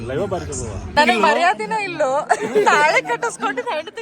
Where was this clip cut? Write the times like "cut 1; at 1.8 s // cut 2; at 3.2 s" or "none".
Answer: cut 1; at 0.9 s